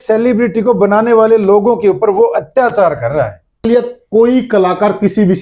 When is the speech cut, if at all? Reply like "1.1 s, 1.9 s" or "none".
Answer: 3.6 s